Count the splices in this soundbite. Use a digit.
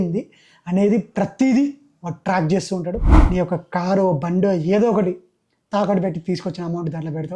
1